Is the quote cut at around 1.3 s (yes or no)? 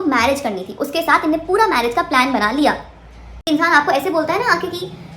no